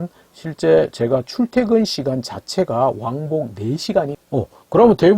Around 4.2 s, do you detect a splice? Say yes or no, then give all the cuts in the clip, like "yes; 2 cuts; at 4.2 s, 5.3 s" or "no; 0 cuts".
yes; 1 cut; at 4.2 s